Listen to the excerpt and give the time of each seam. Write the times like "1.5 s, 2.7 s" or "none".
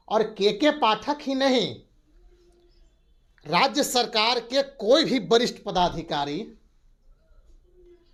none